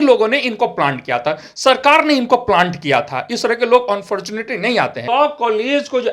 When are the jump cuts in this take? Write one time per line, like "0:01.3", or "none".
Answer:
0:05.0